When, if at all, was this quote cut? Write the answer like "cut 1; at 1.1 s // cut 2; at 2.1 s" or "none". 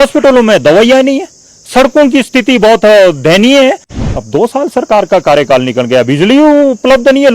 cut 1; at 4.0 s